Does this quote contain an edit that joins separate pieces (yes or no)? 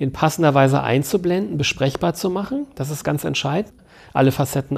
yes